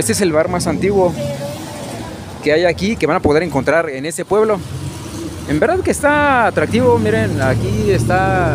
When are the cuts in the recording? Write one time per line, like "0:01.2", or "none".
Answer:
none